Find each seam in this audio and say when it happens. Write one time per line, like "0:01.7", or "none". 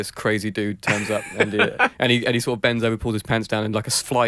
none

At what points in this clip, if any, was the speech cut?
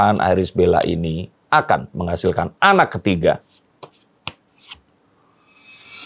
none

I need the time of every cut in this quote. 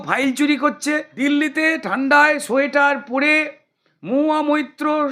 0:01.1

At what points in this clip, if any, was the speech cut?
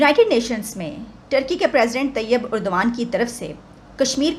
none

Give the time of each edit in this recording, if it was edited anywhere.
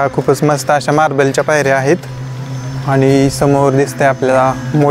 none

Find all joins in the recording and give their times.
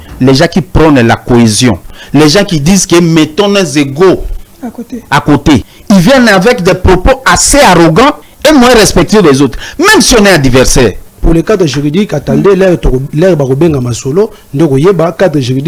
0:01.9
0:05.7
0:08.3
0:11.1

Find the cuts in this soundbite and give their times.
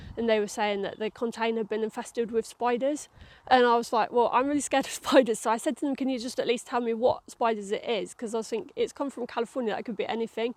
none

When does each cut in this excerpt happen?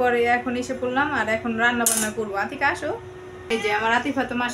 0:03.5

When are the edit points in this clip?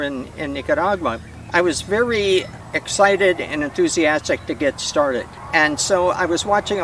0:01.3
0:02.6
0:05.4

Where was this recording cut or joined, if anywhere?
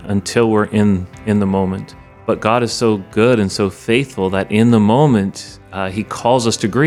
0:02.2

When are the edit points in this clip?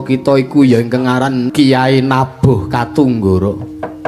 0:01.5

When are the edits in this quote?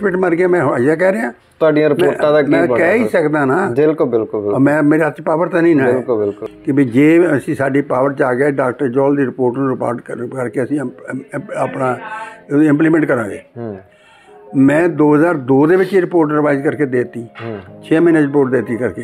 0:06.4

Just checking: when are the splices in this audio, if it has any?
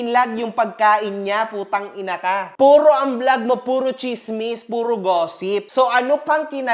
0:05.7

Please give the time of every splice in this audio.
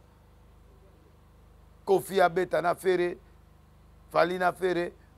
none

